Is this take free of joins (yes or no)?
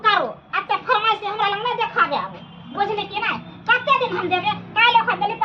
yes